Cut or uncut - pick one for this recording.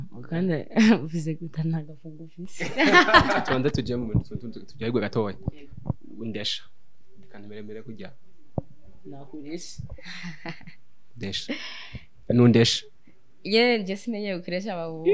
cut